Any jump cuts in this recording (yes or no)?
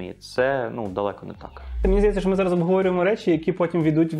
yes